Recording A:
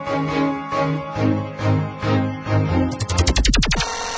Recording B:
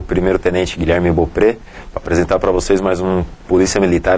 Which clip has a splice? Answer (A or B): A